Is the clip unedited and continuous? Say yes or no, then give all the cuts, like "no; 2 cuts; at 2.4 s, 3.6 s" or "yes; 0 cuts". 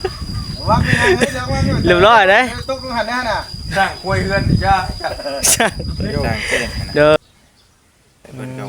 no; 1 cut; at 7.2 s